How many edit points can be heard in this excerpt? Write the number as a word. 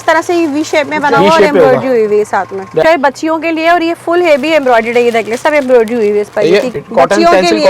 two